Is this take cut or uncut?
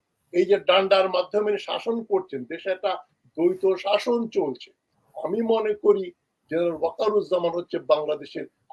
uncut